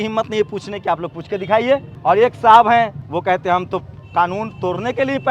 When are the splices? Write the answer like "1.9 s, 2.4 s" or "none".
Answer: 1.9 s, 3.0 s